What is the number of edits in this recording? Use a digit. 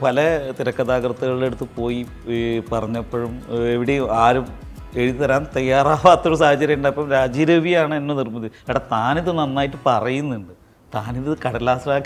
0